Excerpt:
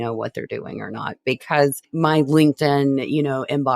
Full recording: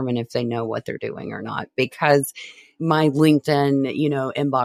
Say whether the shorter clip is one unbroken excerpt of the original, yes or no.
no